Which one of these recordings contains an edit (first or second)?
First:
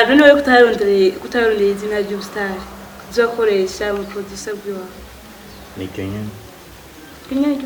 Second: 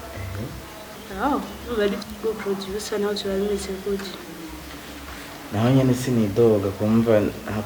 second